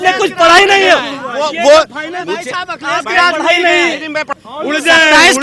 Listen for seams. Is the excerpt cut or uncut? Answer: cut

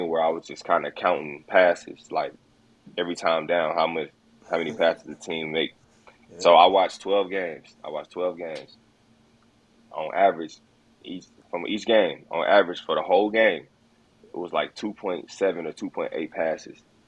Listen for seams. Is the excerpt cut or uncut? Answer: uncut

